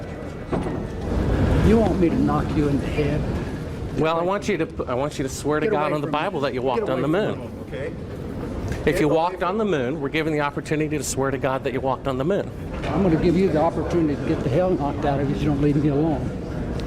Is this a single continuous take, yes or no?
no